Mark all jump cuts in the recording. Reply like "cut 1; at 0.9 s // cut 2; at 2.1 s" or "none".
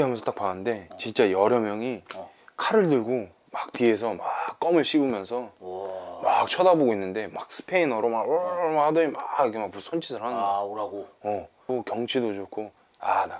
cut 1; at 11.6 s

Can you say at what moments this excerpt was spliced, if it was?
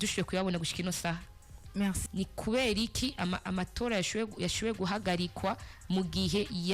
cut 1; at 2.0 s

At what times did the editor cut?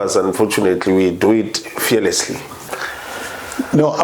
cut 1; at 2.7 s

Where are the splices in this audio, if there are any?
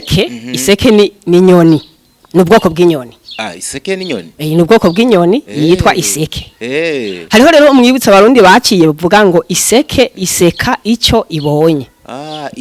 none

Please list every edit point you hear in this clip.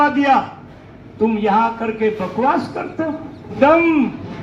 cut 1; at 3.5 s

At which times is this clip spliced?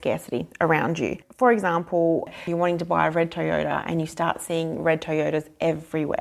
cut 1; at 1.2 s // cut 2; at 2.4 s

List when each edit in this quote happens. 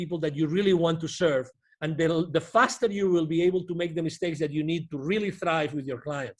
none

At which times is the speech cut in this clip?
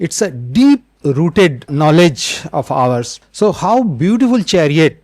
cut 1; at 1.7 s // cut 2; at 3.1 s

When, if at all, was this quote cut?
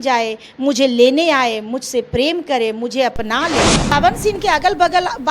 cut 1; at 3.9 s

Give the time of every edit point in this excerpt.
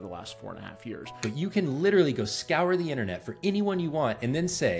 cut 1; at 1.2 s

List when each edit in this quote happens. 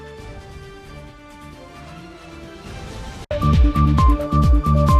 cut 1; at 3.2 s

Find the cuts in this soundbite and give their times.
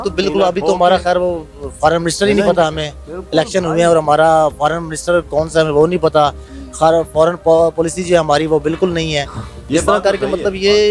none

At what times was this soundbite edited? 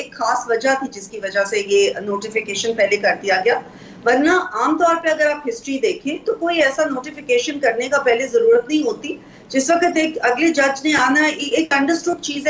none

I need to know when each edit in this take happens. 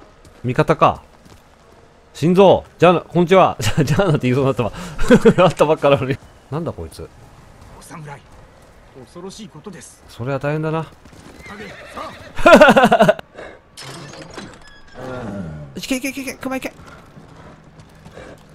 cut 1; at 6.3 s // cut 2; at 13.2 s

